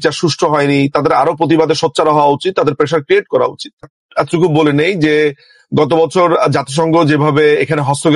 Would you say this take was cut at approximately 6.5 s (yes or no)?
no